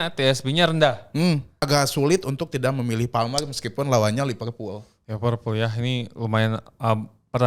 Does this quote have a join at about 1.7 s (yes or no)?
yes